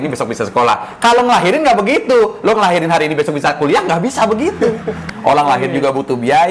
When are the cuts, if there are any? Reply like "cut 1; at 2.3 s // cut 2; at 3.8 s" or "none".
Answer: cut 1; at 5.0 s